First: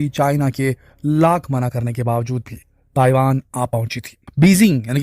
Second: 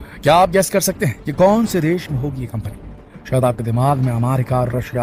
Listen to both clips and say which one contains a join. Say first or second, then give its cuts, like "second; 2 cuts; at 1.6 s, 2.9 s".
first; 1 cut; at 2.1 s